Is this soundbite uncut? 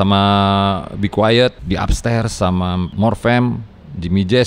no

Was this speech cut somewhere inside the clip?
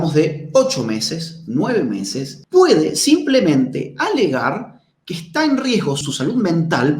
yes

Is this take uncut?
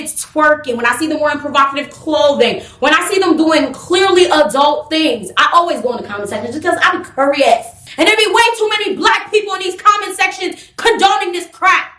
yes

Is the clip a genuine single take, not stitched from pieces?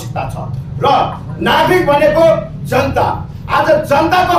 yes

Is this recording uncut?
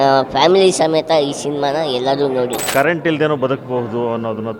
no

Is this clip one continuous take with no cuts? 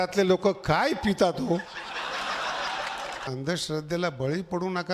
no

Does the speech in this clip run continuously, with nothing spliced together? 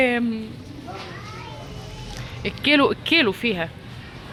yes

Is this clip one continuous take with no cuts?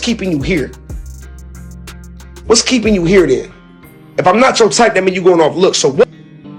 yes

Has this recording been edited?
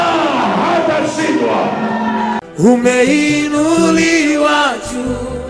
yes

